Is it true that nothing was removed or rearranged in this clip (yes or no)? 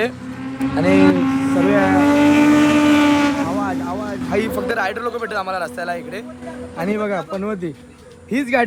yes